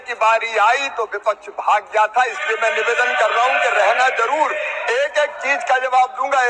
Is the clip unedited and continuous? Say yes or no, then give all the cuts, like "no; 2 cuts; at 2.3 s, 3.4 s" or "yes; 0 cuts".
yes; 0 cuts